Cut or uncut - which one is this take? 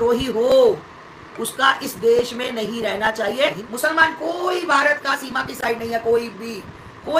cut